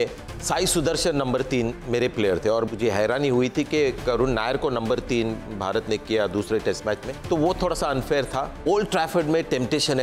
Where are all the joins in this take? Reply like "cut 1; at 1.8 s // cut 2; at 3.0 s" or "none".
cut 1; at 2.7 s // cut 2; at 7.2 s // cut 3; at 8.5 s